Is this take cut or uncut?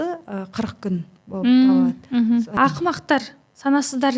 cut